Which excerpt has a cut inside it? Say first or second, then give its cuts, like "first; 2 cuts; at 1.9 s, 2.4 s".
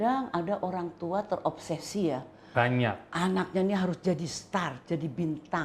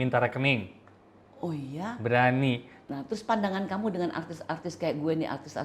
second; 1 cut; at 2.8 s